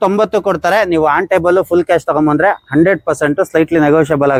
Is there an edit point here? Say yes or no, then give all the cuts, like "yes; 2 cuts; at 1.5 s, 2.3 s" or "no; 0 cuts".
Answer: no; 0 cuts